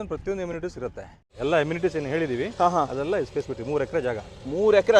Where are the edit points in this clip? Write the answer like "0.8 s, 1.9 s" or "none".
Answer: 1.2 s